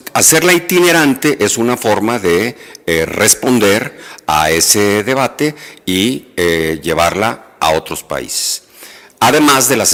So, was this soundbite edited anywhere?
no; 0 cuts

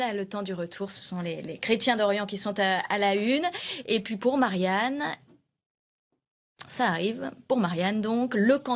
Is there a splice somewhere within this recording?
yes; 1 cut; at 2.3 s

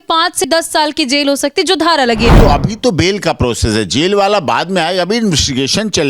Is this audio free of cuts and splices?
no; 1 cut; at 2.4 s

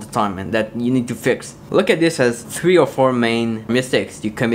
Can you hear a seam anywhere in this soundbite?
yes; 3 cuts; at 1.5 s, 2.4 s, 3.7 s

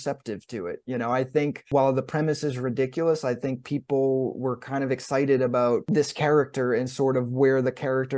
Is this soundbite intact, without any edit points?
no; 2 cuts; at 1.6 s, 5.8 s

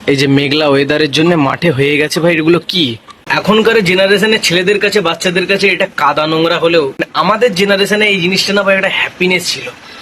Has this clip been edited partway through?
yes; 2 cuts; at 3.4 s, 7.0 s

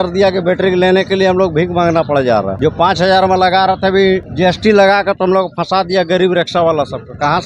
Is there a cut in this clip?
yes; 2 cuts; at 2.5 s, 4.3 s

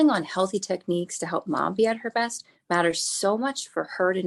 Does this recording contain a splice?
no; 0 cuts

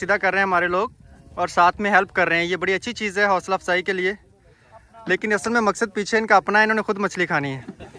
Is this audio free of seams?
yes; 0 cuts

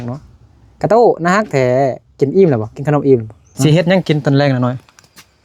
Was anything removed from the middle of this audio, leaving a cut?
yes; 1 cut; at 3.5 s

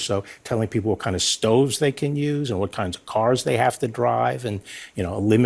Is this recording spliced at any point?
no; 0 cuts

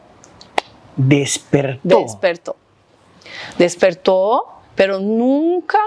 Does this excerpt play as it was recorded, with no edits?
yes; 0 cuts

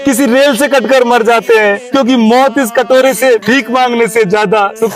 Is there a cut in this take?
no; 0 cuts

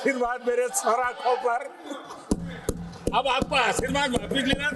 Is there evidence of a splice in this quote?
no; 0 cuts

